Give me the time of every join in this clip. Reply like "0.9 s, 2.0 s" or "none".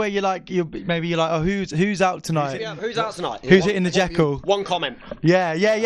2.8 s